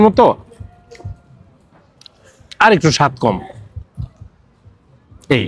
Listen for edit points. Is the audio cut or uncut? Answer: uncut